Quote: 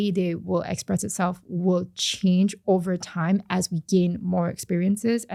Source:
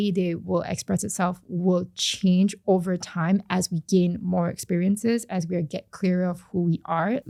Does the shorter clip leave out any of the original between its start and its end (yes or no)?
no